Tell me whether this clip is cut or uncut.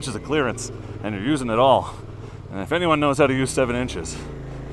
uncut